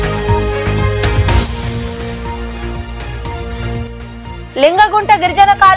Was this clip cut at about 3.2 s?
no; 1 cut; at 1.1 s

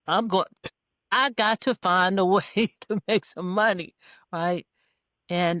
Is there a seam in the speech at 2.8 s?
no; 0 cuts

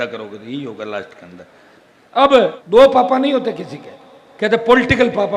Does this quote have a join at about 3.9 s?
no; 1 cut; at 2.6 s

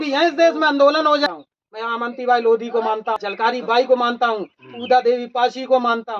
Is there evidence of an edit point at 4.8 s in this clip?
no; 2 cuts; at 1.3 s, 3.2 s

